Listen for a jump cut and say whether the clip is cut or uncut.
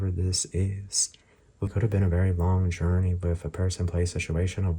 cut